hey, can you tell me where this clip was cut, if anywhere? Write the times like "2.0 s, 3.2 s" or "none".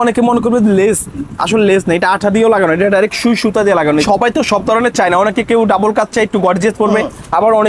4.0 s